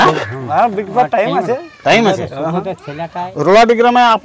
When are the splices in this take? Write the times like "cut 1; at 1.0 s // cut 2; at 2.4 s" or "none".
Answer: cut 1; at 3.2 s